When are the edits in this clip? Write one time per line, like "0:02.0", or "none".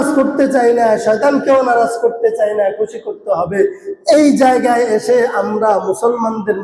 none